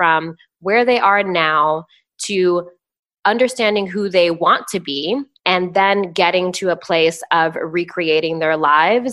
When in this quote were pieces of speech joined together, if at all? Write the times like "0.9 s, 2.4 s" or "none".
5.3 s

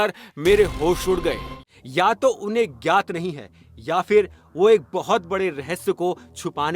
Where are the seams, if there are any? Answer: 1.5 s

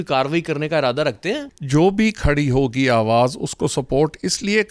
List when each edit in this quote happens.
1.5 s

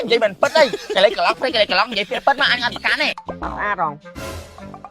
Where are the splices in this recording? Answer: 3.2 s

